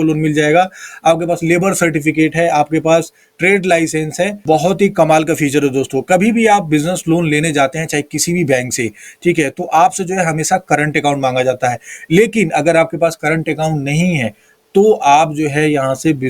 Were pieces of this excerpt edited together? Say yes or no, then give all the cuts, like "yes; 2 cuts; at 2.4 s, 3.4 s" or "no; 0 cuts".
yes; 1 cut; at 4.4 s